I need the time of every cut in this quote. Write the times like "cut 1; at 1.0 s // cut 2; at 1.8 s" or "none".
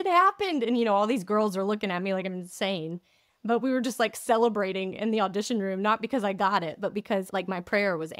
cut 1; at 7.3 s